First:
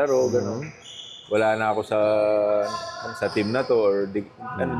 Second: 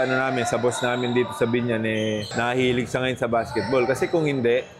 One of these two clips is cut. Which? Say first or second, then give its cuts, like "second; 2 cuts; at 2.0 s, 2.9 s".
second; 1 cut; at 2.3 s